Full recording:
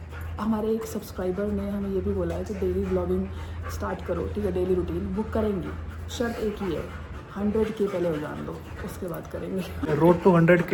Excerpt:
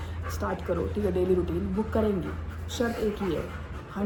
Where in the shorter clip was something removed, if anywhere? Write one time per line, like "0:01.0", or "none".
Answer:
none